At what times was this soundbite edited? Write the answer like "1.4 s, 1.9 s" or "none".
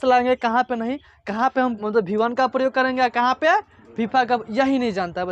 1.8 s